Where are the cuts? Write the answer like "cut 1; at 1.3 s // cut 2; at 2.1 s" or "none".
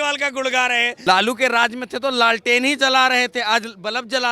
cut 1; at 0.9 s